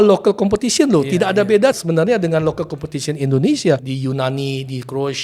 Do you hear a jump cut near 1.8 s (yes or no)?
yes